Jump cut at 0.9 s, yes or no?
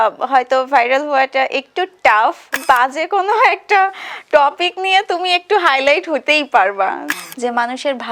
no